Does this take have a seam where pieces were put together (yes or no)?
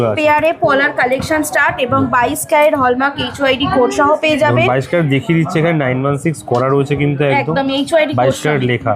no